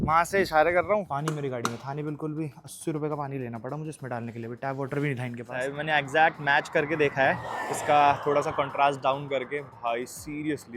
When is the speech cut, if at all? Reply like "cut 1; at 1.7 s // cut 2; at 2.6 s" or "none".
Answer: cut 1; at 1.0 s // cut 2; at 5.7 s